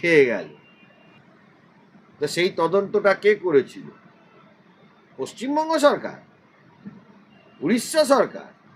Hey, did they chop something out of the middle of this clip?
yes; 1 cut; at 1.1 s

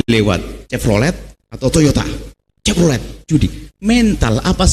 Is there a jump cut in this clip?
no; 0 cuts

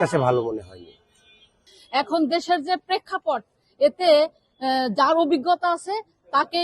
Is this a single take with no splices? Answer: no; 1 cut; at 1.7 s

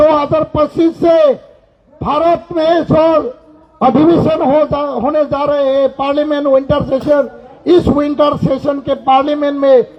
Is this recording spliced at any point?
no; 0 cuts

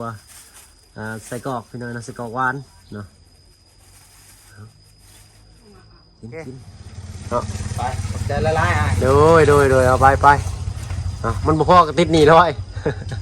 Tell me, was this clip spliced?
yes; 1 cut; at 6.3 s

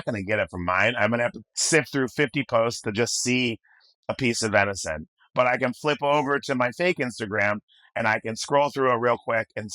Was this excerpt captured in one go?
no; 1 cut; at 1.5 s

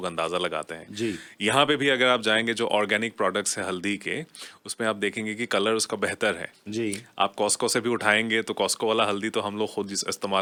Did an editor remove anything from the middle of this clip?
no; 0 cuts

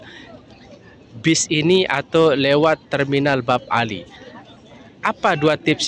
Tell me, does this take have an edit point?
no; 0 cuts

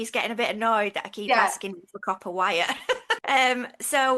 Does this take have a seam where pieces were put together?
yes; 1 cut; at 3.1 s

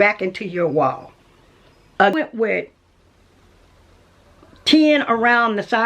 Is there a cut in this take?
yes; 1 cut; at 2.1 s

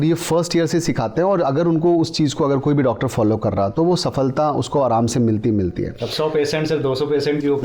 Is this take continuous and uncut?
yes; 0 cuts

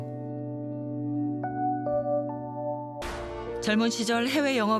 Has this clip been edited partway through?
yes; 1 cut; at 3.0 s

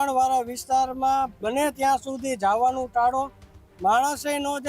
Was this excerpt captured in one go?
yes; 0 cuts

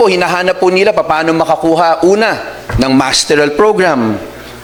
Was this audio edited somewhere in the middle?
no; 0 cuts

